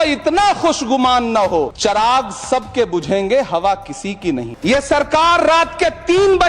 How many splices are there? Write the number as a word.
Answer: two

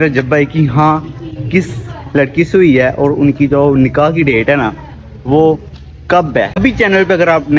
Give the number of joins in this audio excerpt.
one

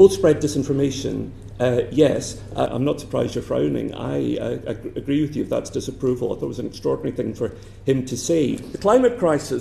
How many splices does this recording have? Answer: two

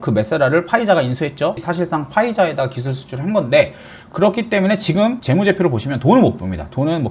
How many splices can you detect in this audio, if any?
one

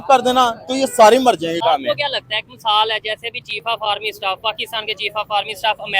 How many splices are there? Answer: one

